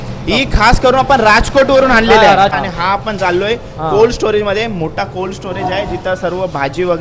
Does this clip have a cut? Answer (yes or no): yes